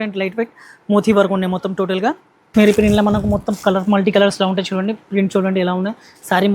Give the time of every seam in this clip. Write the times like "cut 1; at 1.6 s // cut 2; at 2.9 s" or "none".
cut 1; at 2.5 s